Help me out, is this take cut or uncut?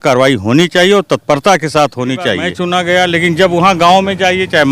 cut